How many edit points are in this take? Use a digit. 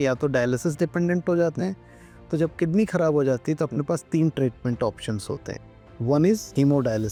0